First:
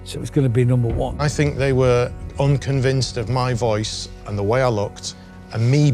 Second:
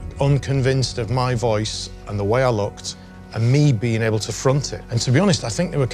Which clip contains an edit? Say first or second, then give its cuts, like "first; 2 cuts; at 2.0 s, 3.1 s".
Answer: first; 1 cut; at 1.1 s